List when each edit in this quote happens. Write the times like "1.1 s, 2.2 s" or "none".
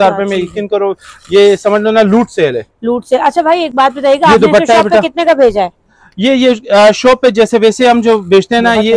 none